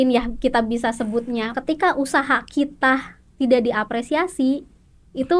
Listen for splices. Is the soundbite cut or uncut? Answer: cut